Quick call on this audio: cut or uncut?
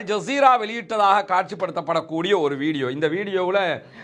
uncut